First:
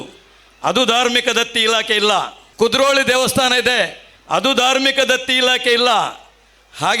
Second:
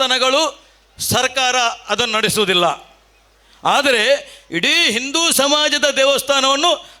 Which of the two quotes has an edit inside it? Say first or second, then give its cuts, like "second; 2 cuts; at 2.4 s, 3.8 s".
first; 1 cut; at 2.4 s